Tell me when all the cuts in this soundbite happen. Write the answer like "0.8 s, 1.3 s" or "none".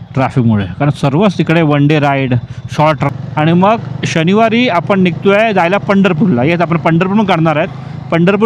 3.1 s